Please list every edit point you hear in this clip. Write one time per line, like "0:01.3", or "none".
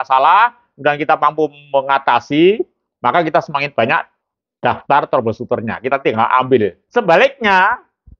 0:06.8